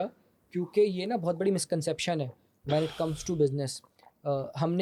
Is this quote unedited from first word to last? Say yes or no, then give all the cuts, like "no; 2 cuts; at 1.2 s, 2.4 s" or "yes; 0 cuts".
yes; 0 cuts